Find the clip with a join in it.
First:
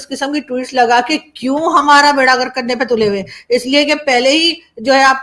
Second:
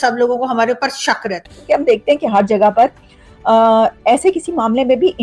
second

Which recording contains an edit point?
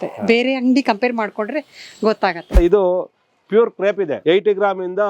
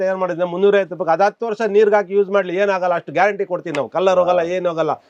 first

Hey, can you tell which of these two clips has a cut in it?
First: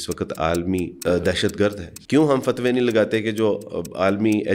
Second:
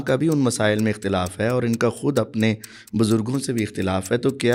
first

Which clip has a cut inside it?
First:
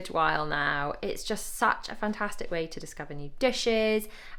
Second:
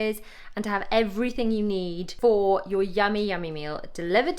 second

